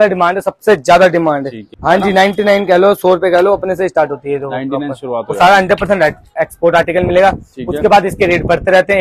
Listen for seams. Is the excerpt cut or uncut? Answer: cut